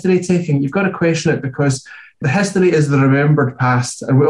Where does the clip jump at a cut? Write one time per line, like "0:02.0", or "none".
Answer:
0:02.2